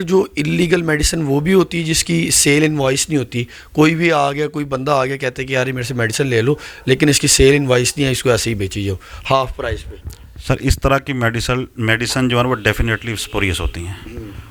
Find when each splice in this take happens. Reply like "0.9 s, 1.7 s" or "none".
none